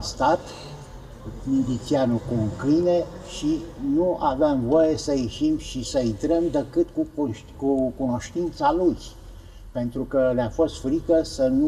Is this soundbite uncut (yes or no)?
yes